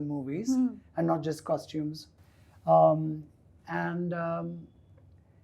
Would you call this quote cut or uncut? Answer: uncut